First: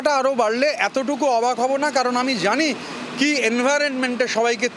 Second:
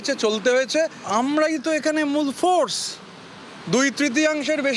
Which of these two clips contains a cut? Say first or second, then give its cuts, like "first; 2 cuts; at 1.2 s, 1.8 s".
second; 1 cut; at 1.0 s